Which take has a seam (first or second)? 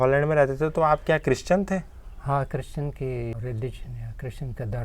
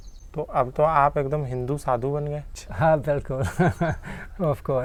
first